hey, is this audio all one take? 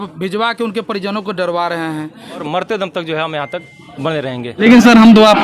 no; 2 cuts; at 2.4 s, 4.6 s

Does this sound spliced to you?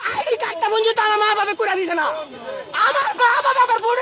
no; 0 cuts

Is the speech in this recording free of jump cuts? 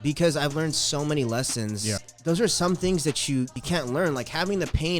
no; 2 cuts; at 2.0 s, 3.6 s

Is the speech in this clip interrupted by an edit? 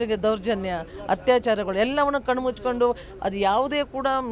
no; 0 cuts

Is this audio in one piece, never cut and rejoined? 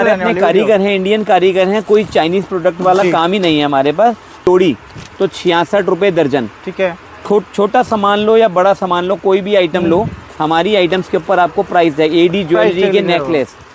no; 1 cut; at 4.5 s

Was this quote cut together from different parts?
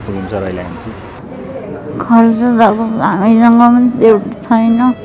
yes; 1 cut; at 1.2 s

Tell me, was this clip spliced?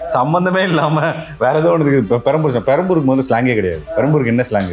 yes; 1 cut; at 3.8 s

